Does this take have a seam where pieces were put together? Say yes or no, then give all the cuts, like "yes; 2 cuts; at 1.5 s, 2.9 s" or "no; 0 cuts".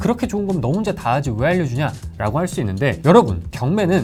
no; 0 cuts